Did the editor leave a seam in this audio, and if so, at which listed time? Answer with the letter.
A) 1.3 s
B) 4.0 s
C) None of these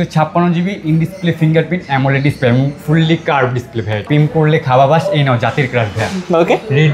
B